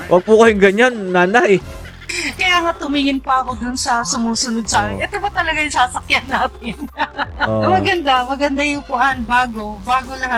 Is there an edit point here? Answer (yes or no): no